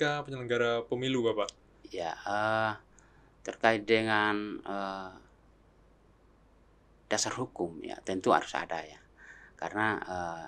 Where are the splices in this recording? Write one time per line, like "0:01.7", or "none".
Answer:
none